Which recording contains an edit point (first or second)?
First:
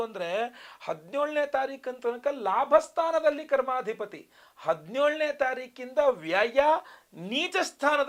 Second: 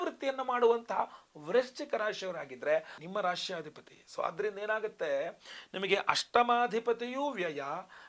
second